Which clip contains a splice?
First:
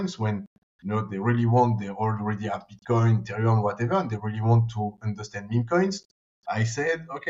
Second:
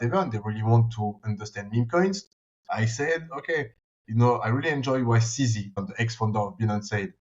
second; 1 cut; at 5.7 s

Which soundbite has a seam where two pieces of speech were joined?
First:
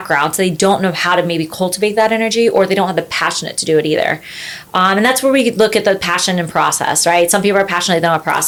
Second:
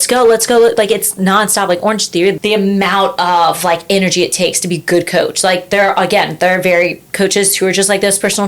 second; 1 cut; at 2.4 s

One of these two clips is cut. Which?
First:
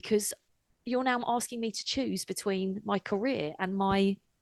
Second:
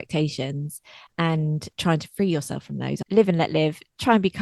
second; 1 cut; at 3.0 s

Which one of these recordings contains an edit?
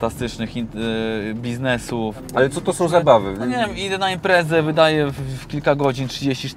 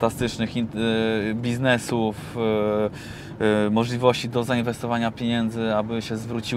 first; 1 cut; at 2.2 s

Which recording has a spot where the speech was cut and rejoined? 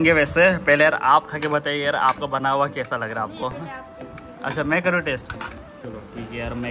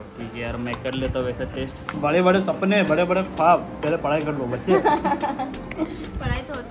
second; 1 cut; at 1.9 s

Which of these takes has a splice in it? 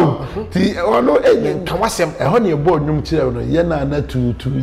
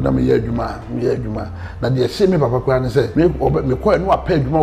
second; 1 cut; at 3.1 s

